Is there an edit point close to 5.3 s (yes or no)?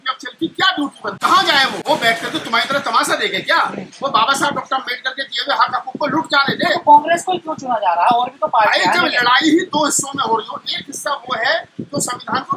no